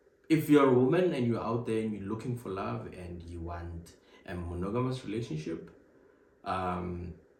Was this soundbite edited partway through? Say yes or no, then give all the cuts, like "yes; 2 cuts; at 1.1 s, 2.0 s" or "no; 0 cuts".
no; 0 cuts